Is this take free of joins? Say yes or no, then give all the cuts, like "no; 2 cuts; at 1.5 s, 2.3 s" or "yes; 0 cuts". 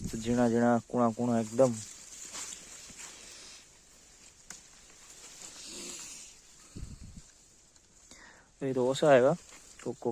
yes; 0 cuts